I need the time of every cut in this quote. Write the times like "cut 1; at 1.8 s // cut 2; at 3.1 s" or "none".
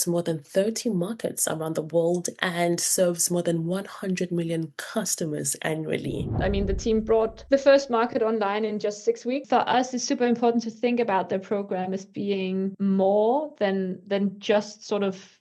cut 1; at 6.4 s // cut 2; at 7.4 s // cut 3; at 9.4 s // cut 4; at 12.7 s